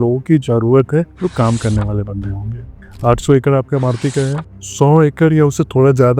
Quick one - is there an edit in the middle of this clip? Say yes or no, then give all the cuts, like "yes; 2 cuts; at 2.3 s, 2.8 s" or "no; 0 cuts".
yes; 2 cuts; at 1.1 s, 2.8 s